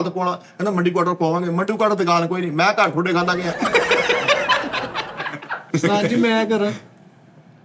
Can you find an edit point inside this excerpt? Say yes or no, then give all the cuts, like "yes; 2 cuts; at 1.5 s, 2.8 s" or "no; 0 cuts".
yes; 1 cut; at 5.6 s